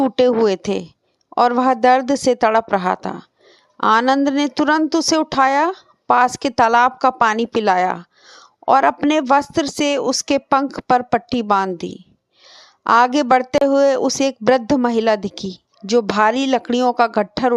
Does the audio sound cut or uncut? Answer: cut